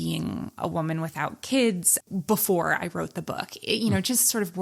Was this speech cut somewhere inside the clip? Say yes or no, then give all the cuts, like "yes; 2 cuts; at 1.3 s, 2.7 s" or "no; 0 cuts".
no; 0 cuts